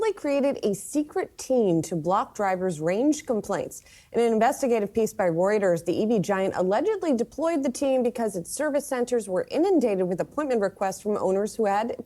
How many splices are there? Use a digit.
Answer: 0